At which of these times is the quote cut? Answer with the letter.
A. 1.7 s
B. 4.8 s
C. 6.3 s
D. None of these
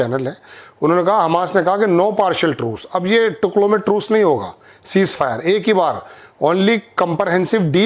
D